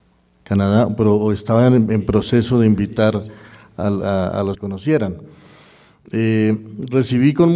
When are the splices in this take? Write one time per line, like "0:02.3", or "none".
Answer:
none